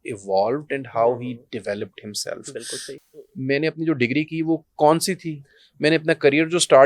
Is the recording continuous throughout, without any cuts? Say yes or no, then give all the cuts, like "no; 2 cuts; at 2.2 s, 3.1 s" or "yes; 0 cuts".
no; 1 cut; at 2.9 s